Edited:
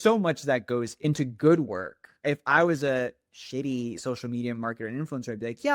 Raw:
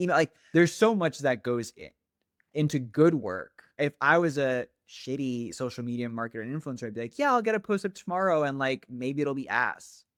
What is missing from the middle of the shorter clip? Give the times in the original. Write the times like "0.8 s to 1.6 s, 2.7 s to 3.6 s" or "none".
1.7 s to 2.5 s

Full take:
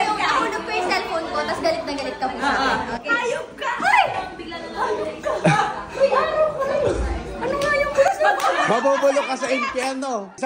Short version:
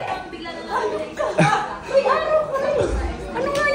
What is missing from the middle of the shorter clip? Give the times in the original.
none

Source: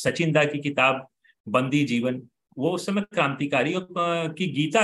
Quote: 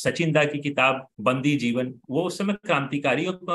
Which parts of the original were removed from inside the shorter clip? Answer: 1.1 s to 1.4 s, 2.3 s to 2.5 s

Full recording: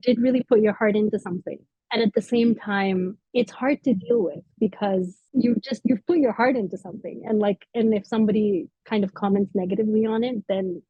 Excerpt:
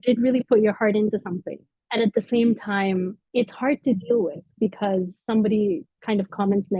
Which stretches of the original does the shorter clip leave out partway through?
5.2 s to 8.1 s

